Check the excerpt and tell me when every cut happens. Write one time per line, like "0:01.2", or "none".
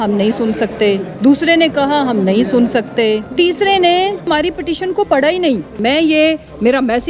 0:01.1
0:03.3
0:04.3
0:05.7